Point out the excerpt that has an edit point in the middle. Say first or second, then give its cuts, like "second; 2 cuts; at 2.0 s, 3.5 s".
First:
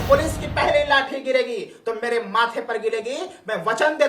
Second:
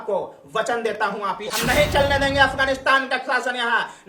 second; 1 cut; at 1.5 s